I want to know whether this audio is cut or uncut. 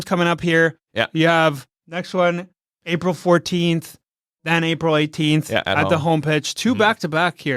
uncut